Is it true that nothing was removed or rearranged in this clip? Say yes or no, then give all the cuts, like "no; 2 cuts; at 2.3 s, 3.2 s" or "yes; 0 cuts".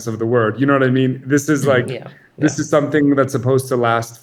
yes; 0 cuts